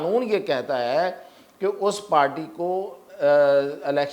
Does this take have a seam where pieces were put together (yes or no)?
no